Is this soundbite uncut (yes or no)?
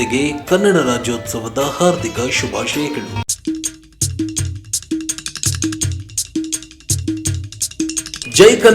no